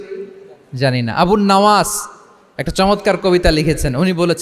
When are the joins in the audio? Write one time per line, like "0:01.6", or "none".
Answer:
none

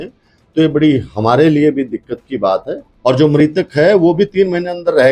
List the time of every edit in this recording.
0:02.8

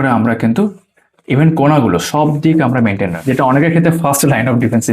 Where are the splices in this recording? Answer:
0:03.2

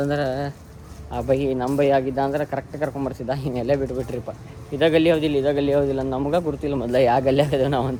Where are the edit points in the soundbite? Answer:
none

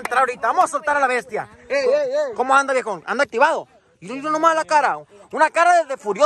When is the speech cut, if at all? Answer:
none

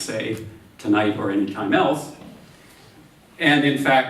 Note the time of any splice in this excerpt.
0:01.2

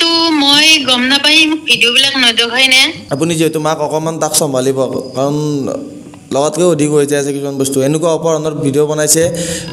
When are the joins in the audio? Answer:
0:02.9

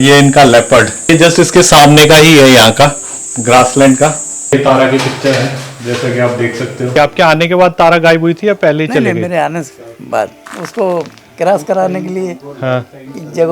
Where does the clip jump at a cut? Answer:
0:01.1
0:04.5
0:06.9
0:10.4

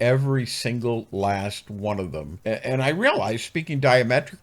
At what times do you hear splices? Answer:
0:02.3

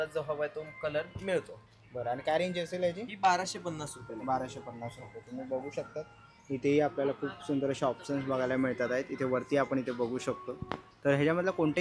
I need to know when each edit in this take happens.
none

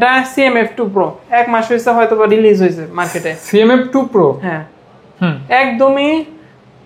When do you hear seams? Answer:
none

